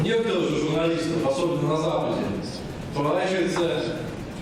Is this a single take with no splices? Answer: yes; 0 cuts

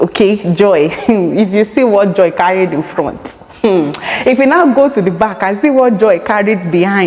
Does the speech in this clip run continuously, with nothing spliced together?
yes; 0 cuts

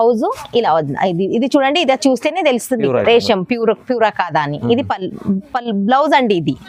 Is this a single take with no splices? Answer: yes; 0 cuts

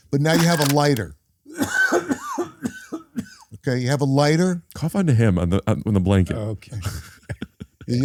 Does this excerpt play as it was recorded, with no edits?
yes; 0 cuts

